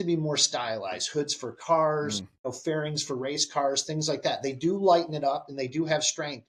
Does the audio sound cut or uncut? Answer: cut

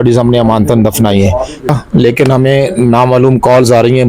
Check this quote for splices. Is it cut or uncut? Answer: cut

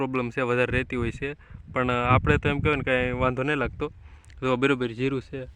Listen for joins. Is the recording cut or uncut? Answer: uncut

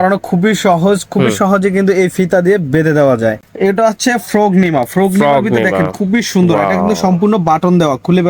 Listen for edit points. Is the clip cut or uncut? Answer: cut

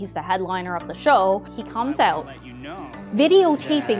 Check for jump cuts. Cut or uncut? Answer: cut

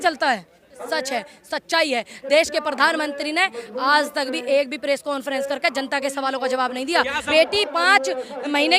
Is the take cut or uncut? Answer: cut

